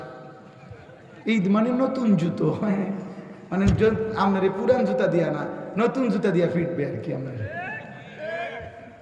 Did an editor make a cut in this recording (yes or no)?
no